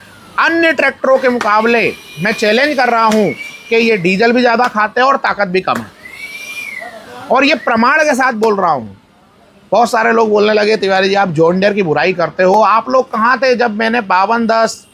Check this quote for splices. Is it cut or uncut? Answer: uncut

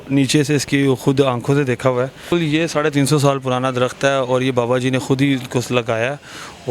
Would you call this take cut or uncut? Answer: cut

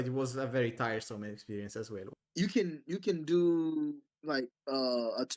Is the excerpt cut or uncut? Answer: cut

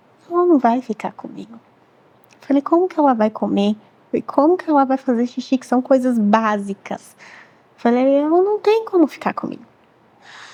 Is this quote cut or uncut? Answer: uncut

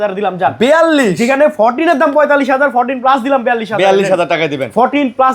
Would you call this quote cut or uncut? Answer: uncut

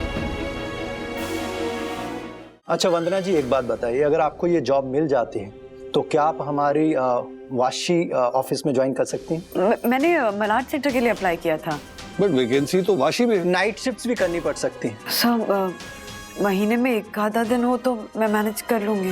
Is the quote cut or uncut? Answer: cut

